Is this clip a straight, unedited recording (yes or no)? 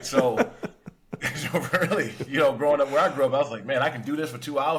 yes